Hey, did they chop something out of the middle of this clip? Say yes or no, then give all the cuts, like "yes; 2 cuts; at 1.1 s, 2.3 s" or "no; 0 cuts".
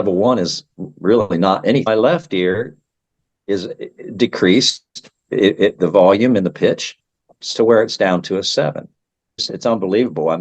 yes; 2 cuts; at 1.9 s, 9.5 s